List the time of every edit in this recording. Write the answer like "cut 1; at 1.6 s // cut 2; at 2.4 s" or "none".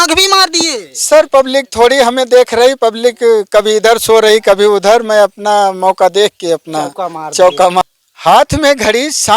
cut 1; at 7.8 s